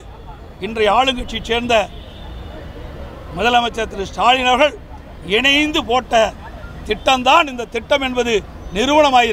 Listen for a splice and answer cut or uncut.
uncut